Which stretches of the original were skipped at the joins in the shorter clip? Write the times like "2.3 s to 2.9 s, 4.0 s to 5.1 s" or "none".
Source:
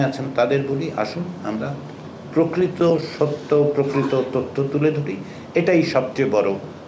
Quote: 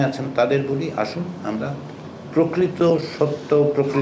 none